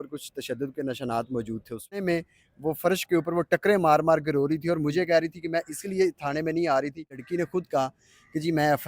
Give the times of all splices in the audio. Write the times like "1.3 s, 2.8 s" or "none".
2.0 s, 7.2 s